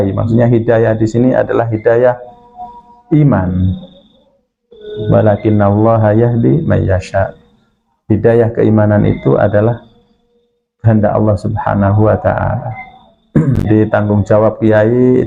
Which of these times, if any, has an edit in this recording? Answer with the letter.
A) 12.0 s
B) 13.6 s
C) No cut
B